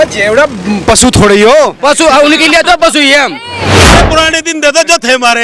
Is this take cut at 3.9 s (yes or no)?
yes